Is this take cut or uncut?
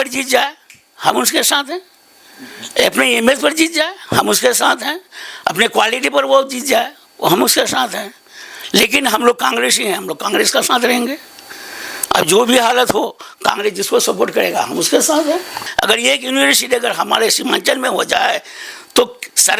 cut